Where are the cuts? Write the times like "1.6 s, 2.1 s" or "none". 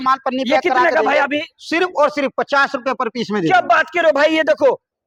none